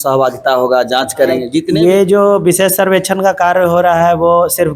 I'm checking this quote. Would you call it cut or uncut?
cut